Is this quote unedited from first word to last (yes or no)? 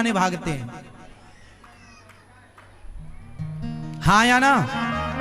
no